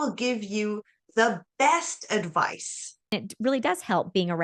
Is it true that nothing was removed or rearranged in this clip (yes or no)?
no